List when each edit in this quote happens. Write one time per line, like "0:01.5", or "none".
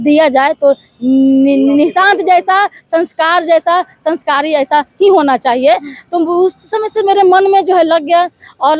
none